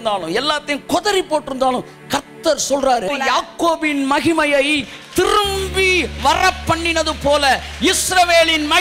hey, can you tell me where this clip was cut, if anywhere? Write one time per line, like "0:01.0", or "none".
0:03.1

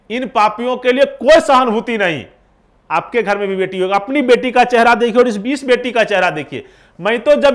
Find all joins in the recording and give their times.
none

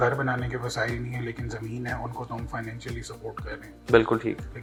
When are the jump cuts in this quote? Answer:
none

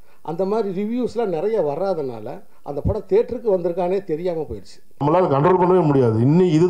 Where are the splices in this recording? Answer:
0:05.0

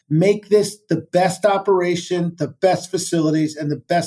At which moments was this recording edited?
none

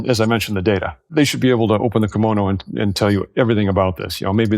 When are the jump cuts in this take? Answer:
0:01.0

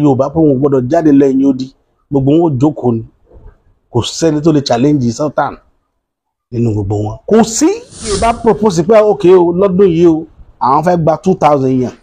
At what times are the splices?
0:08.3

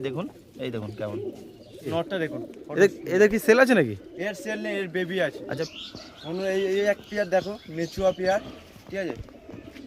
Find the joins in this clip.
0:01.9
0:05.6

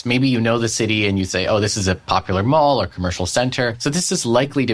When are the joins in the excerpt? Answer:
0:03.8

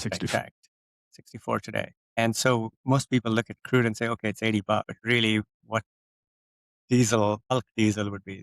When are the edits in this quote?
0:02.0
0:04.9
0:07.5

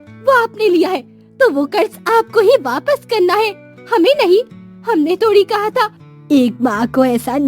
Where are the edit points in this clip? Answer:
0:06.0

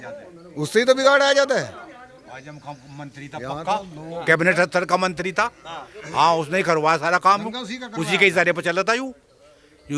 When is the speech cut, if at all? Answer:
none

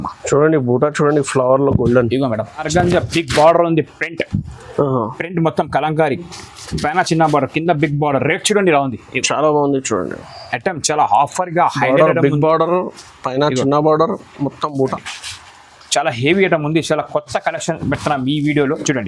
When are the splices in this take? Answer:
0:02.7
0:15.0

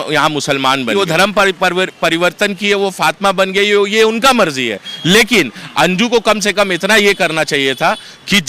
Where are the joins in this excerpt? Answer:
0:00.9

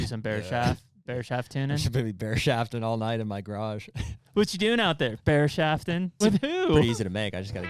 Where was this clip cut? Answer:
0:06.1

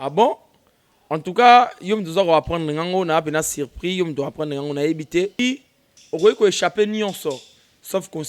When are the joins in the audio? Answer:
0:05.4

